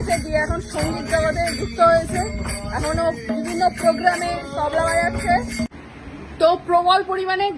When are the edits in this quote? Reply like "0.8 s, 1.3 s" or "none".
5.7 s